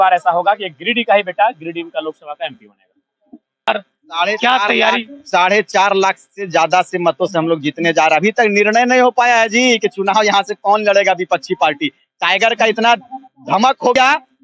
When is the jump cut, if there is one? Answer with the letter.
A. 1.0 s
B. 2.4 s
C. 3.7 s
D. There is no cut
C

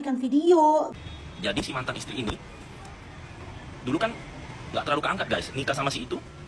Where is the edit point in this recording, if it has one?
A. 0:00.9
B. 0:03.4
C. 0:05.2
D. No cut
A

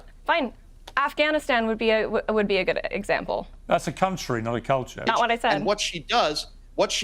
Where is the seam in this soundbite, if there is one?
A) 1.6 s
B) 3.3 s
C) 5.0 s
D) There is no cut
C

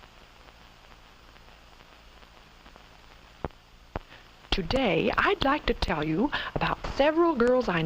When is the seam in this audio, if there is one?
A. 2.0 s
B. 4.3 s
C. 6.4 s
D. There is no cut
C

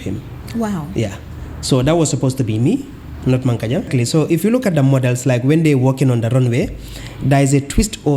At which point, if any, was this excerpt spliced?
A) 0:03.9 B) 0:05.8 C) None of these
A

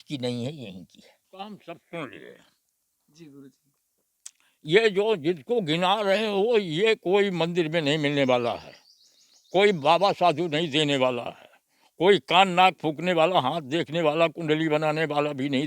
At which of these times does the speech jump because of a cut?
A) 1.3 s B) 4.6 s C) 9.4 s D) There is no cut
A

